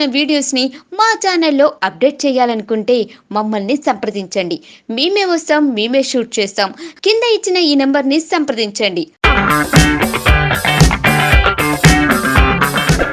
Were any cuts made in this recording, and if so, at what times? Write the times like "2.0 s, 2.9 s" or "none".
none